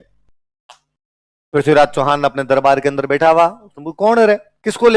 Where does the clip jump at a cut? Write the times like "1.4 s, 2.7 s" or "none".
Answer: none